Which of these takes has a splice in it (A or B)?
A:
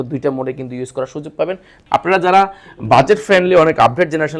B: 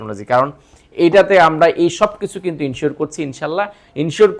A